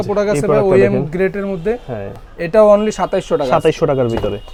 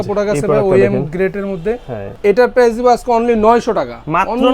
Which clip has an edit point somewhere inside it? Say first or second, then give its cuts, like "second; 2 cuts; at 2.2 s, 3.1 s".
second; 1 cut; at 2.2 s